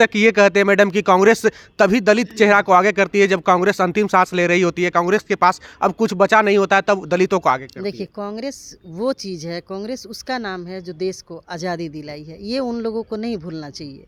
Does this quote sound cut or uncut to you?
uncut